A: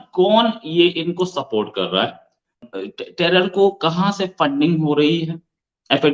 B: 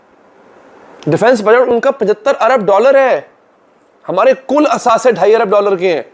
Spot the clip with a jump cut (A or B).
A